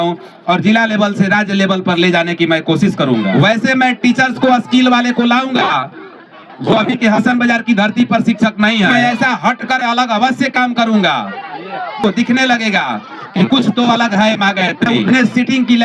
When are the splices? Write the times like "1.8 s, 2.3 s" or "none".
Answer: 3.3 s, 8.9 s, 12.0 s, 15.0 s

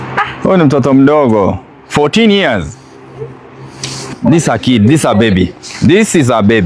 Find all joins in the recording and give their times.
4.1 s

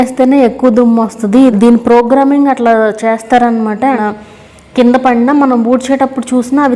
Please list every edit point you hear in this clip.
1.5 s, 4.0 s

